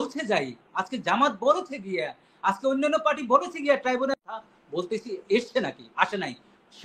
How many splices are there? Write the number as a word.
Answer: one